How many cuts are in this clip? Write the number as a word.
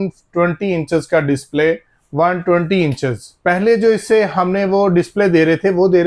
two